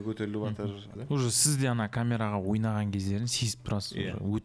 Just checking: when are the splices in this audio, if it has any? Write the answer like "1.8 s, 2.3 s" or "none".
1.0 s